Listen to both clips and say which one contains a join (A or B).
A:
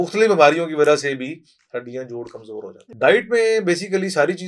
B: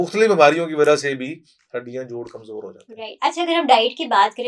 A